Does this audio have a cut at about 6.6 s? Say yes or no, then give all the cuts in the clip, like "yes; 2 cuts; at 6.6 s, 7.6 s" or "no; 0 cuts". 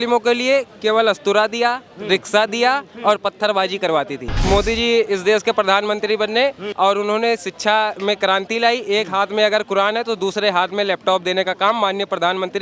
yes; 2 cuts; at 4.4 s, 6.6 s